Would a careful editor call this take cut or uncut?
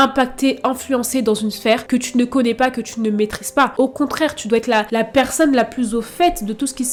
uncut